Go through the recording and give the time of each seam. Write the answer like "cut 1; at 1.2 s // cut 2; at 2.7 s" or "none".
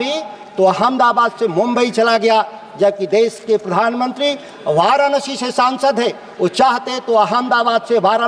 none